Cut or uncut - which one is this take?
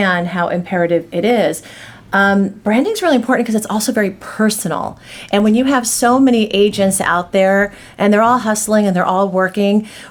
uncut